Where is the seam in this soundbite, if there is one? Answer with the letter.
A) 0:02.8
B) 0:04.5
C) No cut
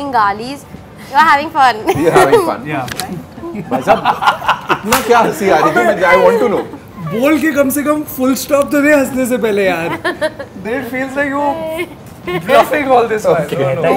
A